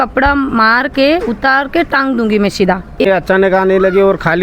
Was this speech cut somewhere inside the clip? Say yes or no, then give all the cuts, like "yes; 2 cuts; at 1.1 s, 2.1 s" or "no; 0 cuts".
yes; 1 cut; at 3.1 s